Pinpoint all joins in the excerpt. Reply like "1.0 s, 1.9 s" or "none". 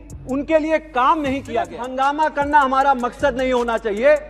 1.8 s